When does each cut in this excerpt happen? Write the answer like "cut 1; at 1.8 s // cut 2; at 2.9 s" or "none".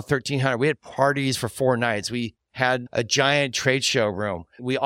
cut 1; at 2.4 s

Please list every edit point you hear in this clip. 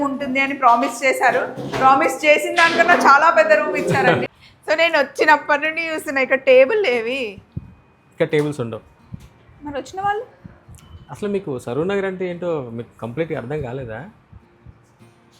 cut 1; at 4.2 s

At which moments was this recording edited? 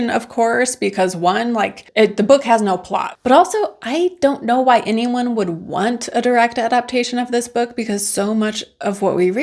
cut 1; at 3.0 s

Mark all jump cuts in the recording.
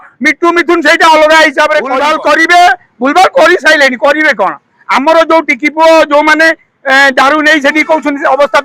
cut 1; at 2.0 s

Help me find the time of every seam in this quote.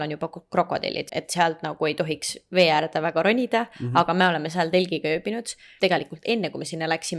cut 1; at 1.0 s // cut 2; at 5.6 s

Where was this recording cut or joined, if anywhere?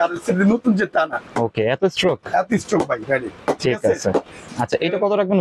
cut 1; at 1.2 s // cut 2; at 4.5 s

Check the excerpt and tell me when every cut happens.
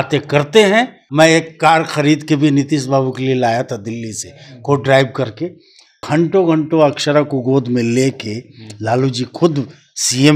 cut 1; at 1.0 s // cut 2; at 5.9 s

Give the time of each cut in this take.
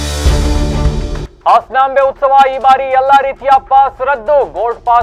cut 1; at 0.9 s

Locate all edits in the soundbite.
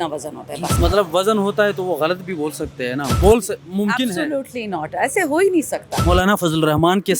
cut 1; at 0.7 s // cut 2; at 5.9 s

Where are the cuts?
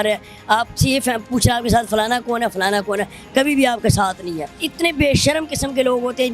cut 1; at 4.7 s

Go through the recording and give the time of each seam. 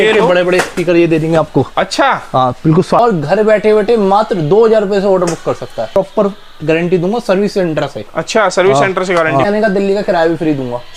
cut 1; at 3.0 s // cut 2; at 5.9 s // cut 3; at 9.4 s

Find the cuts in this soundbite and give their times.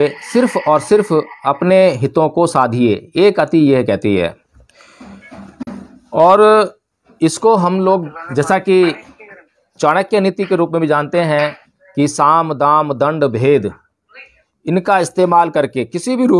none

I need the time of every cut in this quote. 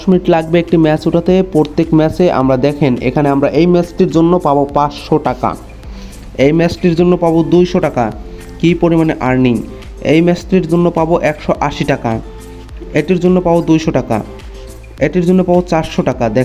none

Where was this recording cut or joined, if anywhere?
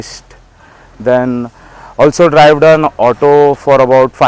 none

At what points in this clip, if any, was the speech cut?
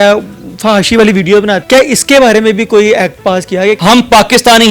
cut 1; at 1.6 s // cut 2; at 3.8 s

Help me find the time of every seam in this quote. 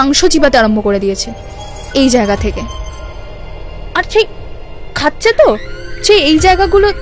none

